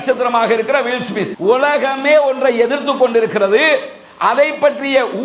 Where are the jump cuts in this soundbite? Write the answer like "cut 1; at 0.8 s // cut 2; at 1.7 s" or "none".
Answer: cut 1; at 1.3 s